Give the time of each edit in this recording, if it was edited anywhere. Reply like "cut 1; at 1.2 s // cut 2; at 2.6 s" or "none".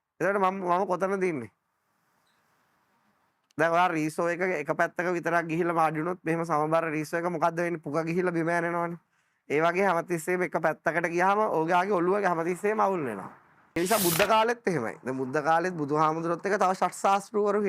cut 1; at 13.8 s